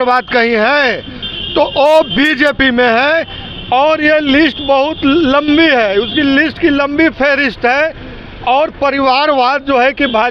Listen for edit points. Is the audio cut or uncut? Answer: uncut